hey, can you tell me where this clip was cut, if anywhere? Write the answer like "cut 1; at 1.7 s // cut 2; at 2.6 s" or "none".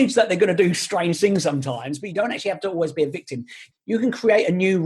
cut 1; at 3.6 s